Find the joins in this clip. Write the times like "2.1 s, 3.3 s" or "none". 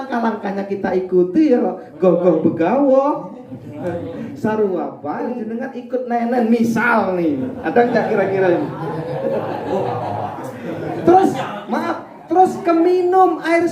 5.3 s